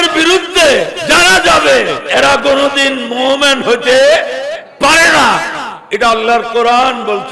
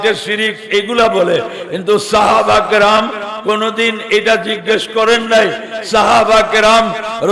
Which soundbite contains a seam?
first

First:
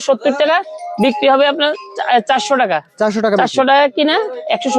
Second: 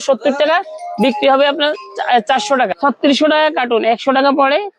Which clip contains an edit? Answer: second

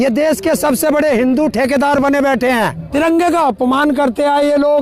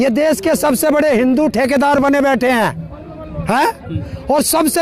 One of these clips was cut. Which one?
first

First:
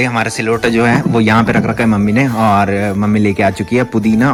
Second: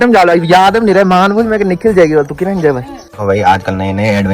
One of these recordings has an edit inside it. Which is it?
second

